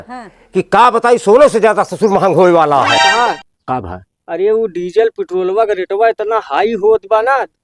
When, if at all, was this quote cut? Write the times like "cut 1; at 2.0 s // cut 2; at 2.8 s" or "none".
cut 1; at 3.0 s